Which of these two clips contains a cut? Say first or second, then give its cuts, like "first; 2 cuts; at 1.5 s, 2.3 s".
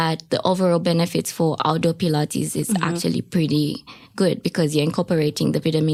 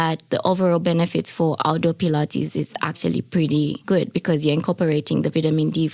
second; 1 cut; at 3.8 s